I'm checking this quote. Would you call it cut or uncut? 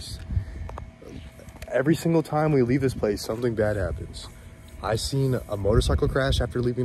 uncut